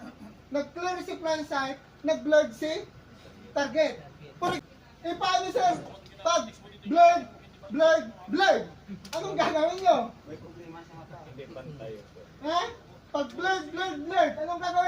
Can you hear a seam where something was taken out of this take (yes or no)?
yes